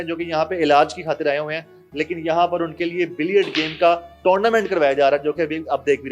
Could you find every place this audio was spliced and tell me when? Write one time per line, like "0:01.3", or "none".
none